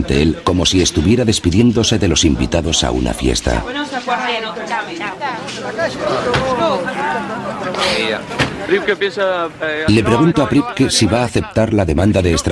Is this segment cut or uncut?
uncut